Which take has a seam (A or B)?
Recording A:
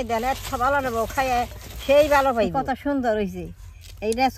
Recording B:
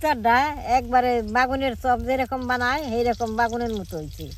A